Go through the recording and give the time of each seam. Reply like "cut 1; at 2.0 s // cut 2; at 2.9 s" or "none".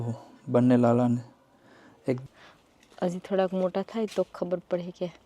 cut 1; at 2.2 s

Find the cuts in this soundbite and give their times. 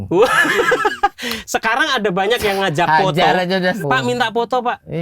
cut 1; at 3.8 s

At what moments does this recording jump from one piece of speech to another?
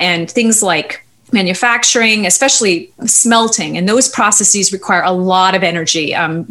none

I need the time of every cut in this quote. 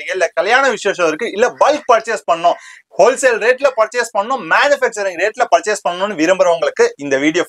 none

